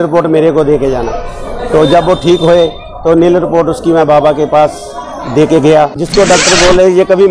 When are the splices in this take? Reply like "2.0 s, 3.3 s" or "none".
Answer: 6.3 s